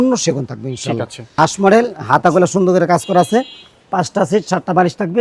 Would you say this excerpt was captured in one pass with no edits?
no; 1 cut; at 1.3 s

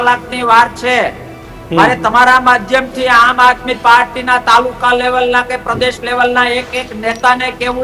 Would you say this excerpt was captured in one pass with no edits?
yes; 0 cuts

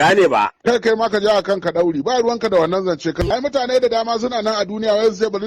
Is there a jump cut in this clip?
yes; 1 cut; at 3.2 s

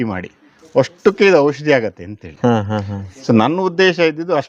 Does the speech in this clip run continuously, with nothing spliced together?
yes; 0 cuts

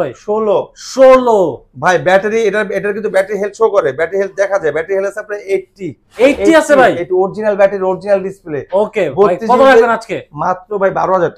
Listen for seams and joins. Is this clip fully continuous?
yes; 0 cuts

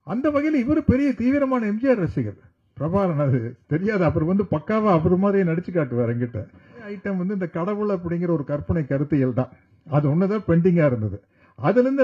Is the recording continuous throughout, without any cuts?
no; 1 cut; at 7.0 s

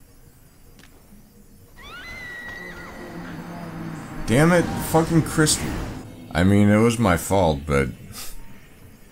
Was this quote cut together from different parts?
no; 0 cuts

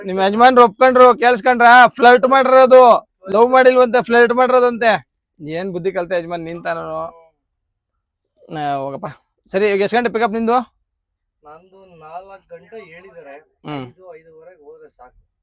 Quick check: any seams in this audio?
no; 0 cuts

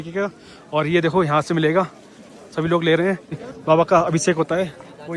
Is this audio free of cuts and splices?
no; 1 cut; at 3.5 s

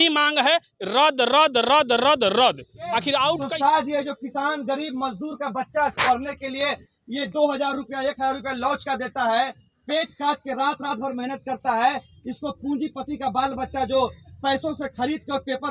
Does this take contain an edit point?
yes; 1 cut; at 3.4 s

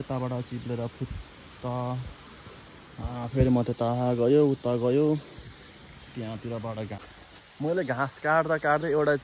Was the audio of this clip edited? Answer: yes; 1 cut; at 7.0 s

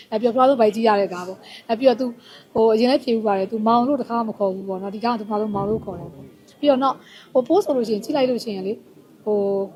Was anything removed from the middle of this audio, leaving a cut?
no; 0 cuts

